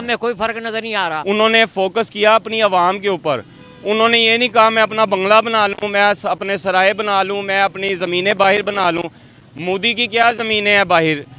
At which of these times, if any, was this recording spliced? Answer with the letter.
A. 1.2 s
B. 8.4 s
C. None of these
A